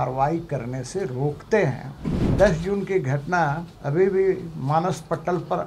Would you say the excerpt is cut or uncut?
cut